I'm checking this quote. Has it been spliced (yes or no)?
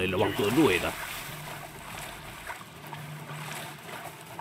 no